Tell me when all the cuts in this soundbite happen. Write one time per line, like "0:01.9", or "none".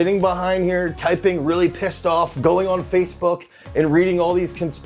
none